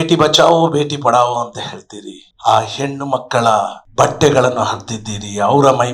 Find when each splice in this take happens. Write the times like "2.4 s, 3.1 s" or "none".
3.8 s